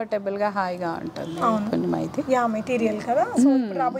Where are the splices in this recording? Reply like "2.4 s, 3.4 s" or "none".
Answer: none